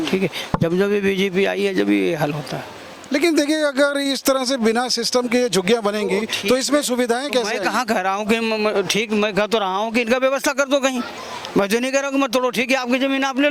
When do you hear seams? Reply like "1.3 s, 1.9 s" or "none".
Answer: none